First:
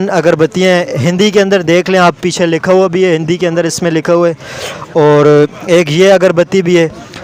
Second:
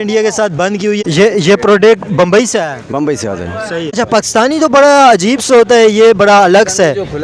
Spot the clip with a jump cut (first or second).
second